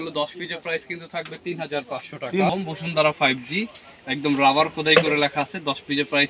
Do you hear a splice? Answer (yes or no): yes